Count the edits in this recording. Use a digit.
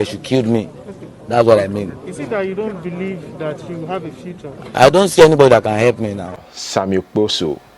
1